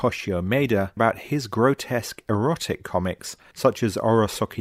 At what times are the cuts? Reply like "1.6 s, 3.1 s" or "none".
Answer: 0.9 s